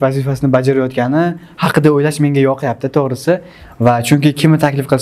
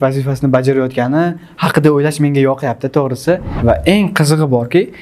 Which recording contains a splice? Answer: second; 1 cut; at 3.5 s

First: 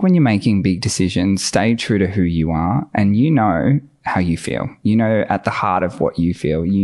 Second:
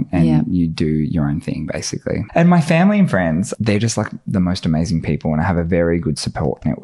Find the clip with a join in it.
second; 2 cuts; at 2.3 s, 3.5 s

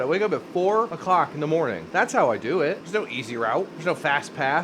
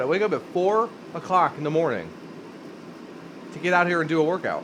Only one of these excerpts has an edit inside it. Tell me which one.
first; 4 cuts; at 1.0 s, 1.9 s, 2.8 s, 3.7 s

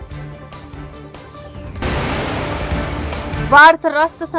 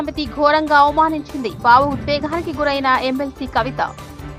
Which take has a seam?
first; 2 cuts; at 1.8 s, 3.4 s

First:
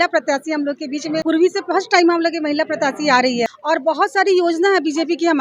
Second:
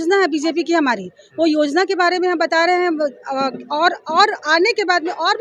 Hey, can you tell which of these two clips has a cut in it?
first; 2 cuts; at 1.2 s, 3.6 s

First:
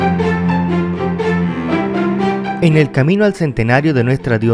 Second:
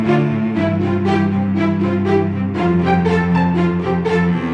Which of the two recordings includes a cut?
first; 1 cut; at 2.6 s

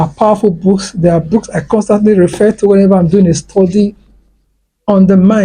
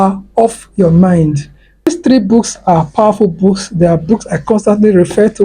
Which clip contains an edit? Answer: second; 1 cut; at 1.9 s

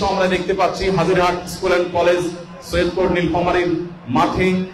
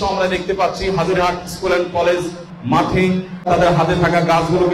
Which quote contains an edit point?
second; 2 cuts; at 2.5 s, 3.5 s

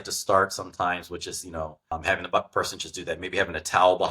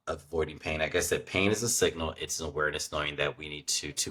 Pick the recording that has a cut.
first; 1 cut; at 1.9 s

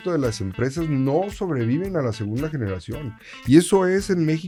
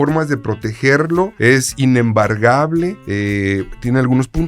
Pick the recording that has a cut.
second; 2 cuts; at 1.3 s, 3.0 s

